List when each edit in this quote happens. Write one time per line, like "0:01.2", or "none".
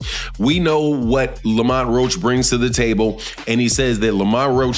none